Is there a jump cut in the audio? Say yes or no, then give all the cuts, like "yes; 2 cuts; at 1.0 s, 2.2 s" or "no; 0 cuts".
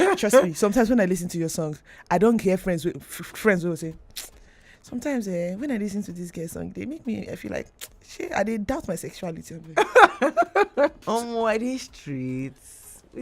yes; 1 cut; at 11.0 s